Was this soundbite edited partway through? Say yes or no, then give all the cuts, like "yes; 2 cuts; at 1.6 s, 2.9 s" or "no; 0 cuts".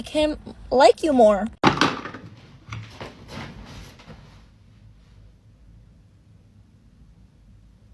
yes; 1 cut; at 1.5 s